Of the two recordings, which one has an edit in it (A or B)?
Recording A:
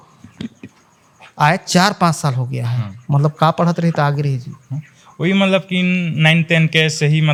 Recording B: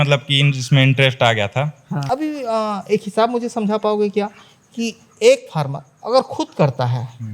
B